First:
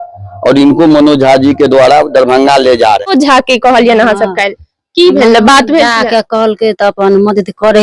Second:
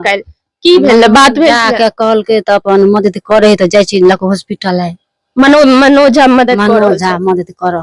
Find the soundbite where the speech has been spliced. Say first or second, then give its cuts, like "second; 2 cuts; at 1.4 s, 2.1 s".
first; 1 cut; at 3.0 s